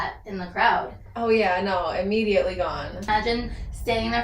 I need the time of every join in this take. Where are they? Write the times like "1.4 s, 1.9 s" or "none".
3.1 s